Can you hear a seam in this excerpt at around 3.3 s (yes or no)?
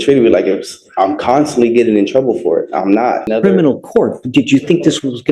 yes